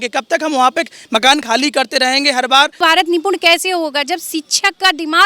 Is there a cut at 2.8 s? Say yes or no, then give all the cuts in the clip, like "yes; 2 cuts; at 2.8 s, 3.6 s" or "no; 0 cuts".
yes; 1 cut; at 2.8 s